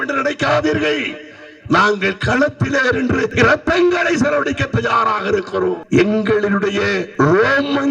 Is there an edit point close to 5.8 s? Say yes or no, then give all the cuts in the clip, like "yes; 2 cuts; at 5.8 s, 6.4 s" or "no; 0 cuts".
yes; 3 cuts; at 3.3 s, 5.8 s, 7.0 s